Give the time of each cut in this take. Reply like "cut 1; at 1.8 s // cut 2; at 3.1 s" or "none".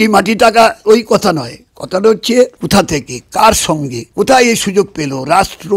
cut 1; at 0.8 s // cut 2; at 2.6 s // cut 3; at 4.0 s